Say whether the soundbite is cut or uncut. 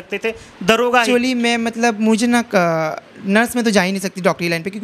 cut